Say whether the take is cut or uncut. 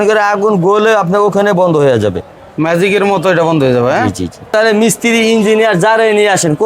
cut